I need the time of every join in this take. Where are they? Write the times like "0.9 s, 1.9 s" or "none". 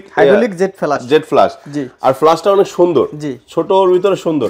none